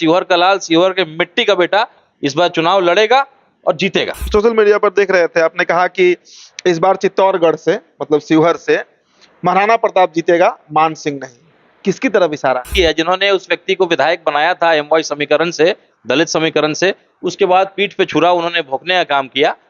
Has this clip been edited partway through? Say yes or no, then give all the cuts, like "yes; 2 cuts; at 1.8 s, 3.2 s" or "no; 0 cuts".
yes; 2 cuts; at 4.2 s, 12.7 s